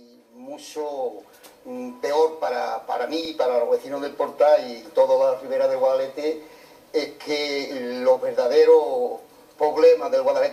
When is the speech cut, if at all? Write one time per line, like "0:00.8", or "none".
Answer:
none